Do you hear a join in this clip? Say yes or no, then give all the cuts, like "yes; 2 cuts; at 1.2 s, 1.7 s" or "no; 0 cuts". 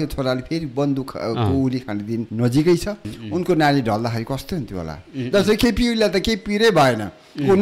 yes; 2 cuts; at 2.3 s, 3.1 s